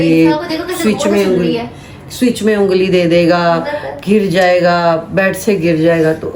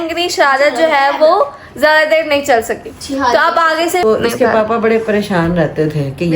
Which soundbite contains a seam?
second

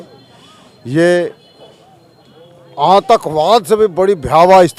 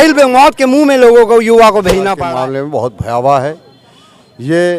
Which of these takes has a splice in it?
second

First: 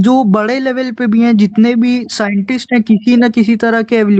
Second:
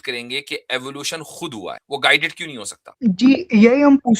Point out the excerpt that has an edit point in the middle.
second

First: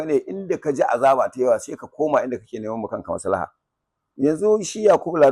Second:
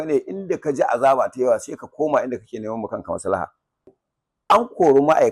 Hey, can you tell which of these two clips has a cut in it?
second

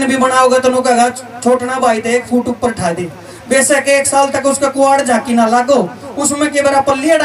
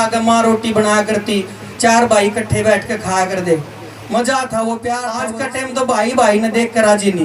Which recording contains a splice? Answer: second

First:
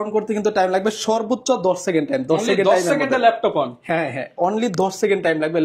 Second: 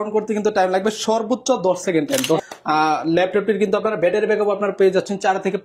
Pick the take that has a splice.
second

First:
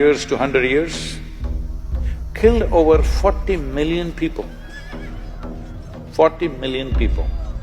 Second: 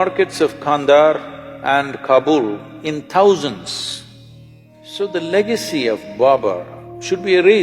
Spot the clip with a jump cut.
second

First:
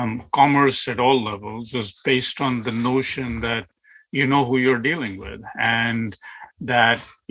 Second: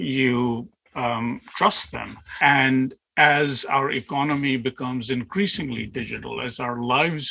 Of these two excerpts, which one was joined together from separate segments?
second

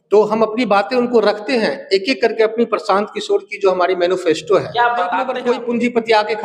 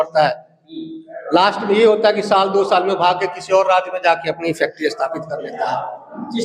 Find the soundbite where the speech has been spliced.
first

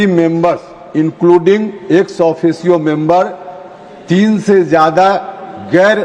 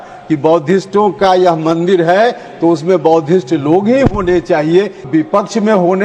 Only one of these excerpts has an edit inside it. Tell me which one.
second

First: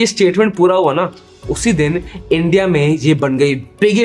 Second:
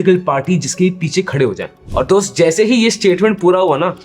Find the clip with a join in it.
second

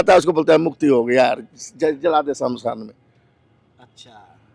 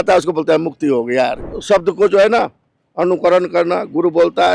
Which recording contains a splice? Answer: second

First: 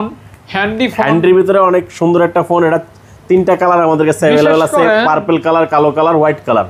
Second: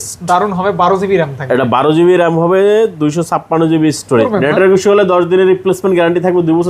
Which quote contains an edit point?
second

